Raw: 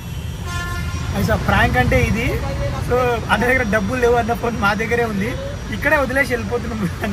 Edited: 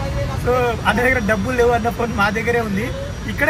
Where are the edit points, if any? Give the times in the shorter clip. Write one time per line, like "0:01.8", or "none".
none